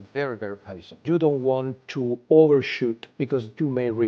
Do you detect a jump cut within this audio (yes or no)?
yes